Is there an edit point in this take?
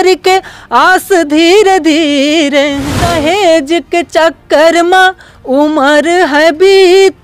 yes; 1 cut; at 2.9 s

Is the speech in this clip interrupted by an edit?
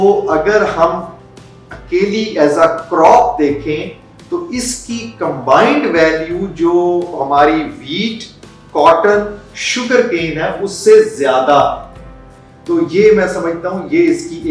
no; 0 cuts

